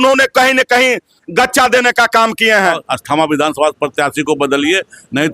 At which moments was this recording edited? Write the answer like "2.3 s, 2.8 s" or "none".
2.9 s

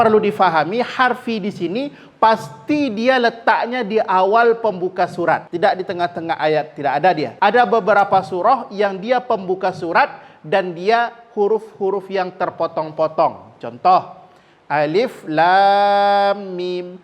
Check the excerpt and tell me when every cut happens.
5.5 s, 7.3 s

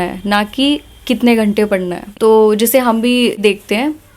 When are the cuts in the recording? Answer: 2.0 s, 3.4 s

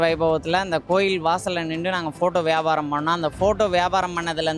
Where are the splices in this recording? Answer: none

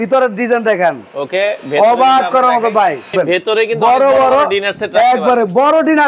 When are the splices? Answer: 3.1 s

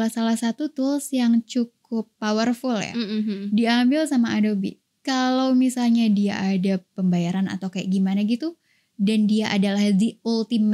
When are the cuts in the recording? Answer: none

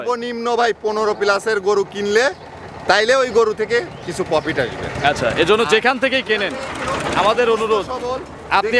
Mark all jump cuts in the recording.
none

